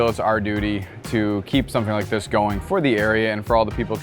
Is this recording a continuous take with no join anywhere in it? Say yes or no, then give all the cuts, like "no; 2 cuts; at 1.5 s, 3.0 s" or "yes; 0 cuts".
yes; 0 cuts